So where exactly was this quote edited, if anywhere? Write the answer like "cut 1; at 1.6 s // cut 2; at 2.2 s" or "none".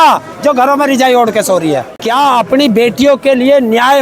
cut 1; at 1.9 s